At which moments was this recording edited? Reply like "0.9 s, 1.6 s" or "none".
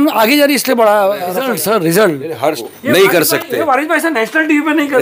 1.4 s, 2.7 s